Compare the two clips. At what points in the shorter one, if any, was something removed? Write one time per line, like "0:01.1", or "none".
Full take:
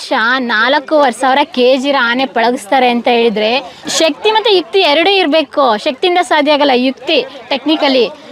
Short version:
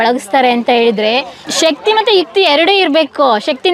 none